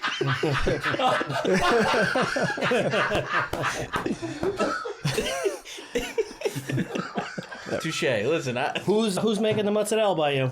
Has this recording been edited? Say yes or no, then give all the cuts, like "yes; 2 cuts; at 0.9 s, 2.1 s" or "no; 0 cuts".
yes; 1 cut; at 9.2 s